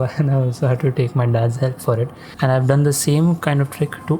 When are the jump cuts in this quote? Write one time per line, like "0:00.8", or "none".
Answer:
0:02.2